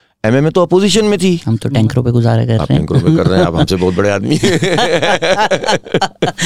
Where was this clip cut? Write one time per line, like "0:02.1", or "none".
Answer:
0:01.5